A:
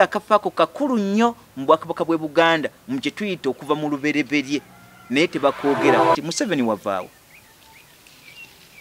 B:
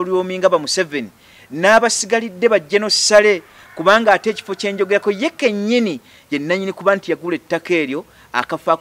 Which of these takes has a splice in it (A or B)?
A